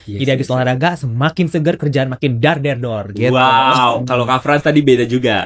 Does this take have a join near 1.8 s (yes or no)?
no